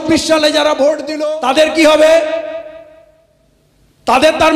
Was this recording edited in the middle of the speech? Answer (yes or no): yes